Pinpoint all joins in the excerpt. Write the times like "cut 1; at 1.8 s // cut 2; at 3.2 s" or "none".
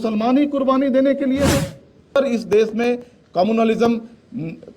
cut 1; at 2.2 s